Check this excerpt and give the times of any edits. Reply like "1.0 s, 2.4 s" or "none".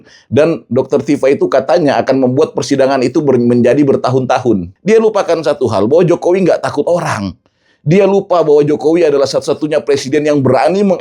4.7 s